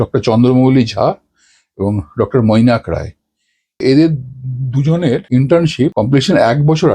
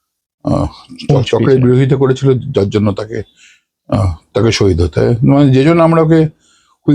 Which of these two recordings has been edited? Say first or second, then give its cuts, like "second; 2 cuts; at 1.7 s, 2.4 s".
first; 3 cuts; at 3.8 s, 5.2 s, 5.9 s